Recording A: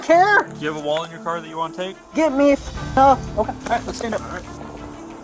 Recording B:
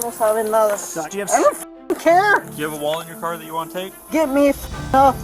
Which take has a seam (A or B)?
B